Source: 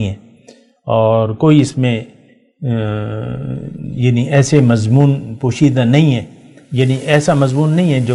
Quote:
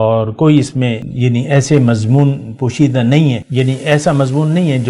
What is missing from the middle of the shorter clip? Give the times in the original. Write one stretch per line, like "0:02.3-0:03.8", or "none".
0:02.1-0:03.9
0:06.3-0:06.7